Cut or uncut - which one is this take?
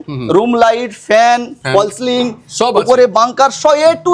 uncut